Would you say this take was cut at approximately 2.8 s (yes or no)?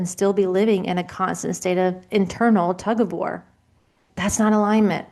no